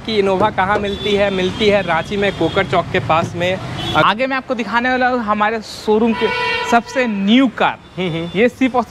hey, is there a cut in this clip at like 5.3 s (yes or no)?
no